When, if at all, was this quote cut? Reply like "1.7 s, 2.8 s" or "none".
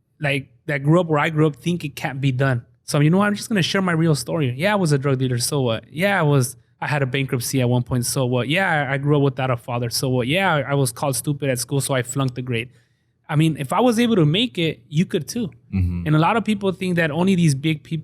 2.7 s